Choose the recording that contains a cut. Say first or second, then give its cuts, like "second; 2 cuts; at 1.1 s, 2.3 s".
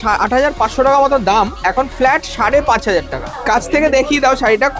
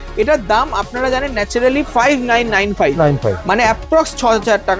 first; 1 cut; at 3.2 s